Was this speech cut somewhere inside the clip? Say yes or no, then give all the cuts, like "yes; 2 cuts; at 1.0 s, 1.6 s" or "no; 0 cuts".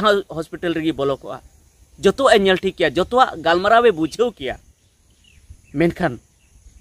no; 0 cuts